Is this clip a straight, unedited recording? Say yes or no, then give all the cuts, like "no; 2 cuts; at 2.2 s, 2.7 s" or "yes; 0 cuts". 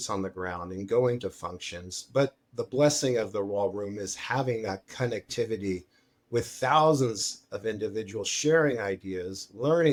yes; 0 cuts